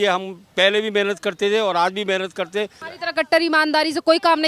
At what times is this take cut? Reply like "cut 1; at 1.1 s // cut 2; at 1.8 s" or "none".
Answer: cut 1; at 2.8 s